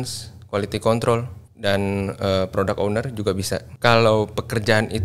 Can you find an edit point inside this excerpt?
yes; 1 cut; at 3.7 s

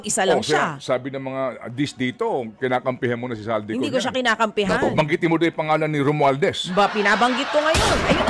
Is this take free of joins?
yes; 0 cuts

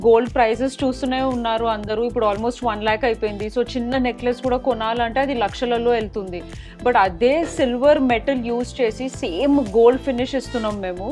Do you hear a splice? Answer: no; 0 cuts

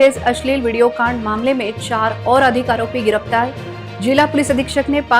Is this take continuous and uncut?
yes; 0 cuts

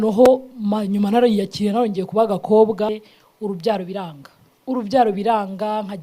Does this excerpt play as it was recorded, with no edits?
no; 1 cut; at 3.1 s

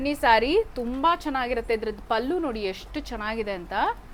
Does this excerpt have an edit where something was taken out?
no; 0 cuts

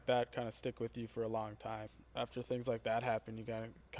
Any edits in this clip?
yes; 1 cut; at 1.9 s

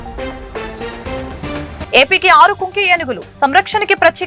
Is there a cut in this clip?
no; 0 cuts

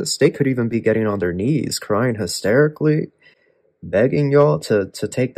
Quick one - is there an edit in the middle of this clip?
no; 0 cuts

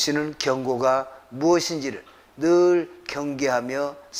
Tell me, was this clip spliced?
no; 0 cuts

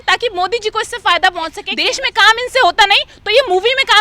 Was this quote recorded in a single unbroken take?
no; 1 cut; at 1.7 s

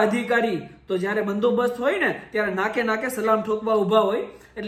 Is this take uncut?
yes; 0 cuts

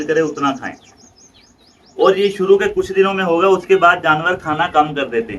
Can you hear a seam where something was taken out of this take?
no; 0 cuts

